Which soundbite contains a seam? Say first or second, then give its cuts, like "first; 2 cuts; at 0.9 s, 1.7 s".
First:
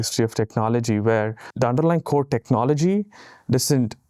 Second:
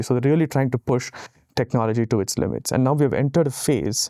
first; 1 cut; at 1.4 s